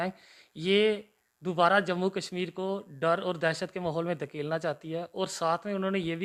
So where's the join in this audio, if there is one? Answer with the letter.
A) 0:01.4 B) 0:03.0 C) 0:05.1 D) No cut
D